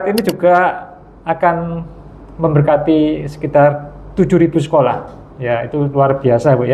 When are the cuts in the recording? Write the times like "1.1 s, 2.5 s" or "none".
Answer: none